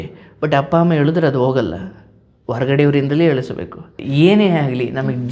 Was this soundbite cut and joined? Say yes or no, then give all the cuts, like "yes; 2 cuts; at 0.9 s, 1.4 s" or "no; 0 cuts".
yes; 1 cut; at 4.0 s